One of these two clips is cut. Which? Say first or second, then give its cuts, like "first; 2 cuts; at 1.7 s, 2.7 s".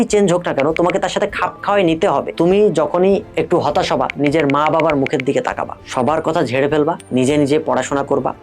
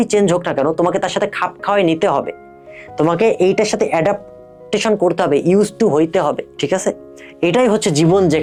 first; 4 cuts; at 2.3 s, 3.3 s, 5.8 s, 7.0 s